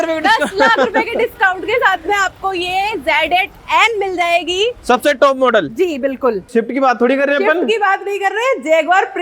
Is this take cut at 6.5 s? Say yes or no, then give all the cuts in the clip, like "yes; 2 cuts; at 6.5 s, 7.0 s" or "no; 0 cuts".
yes; 1 cut; at 6.5 s